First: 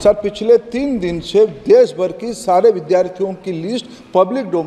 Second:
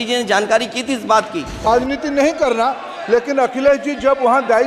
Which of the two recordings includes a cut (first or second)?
second